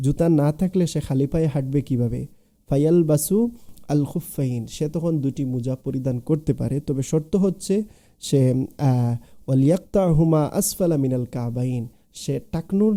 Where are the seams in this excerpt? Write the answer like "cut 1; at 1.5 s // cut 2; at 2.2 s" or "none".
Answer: none